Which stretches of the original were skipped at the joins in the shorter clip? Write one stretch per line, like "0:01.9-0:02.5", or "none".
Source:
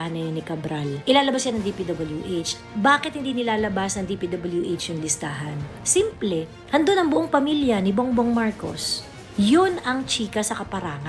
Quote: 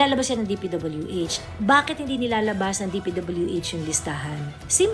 none